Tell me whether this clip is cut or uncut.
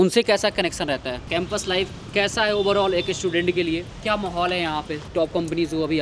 cut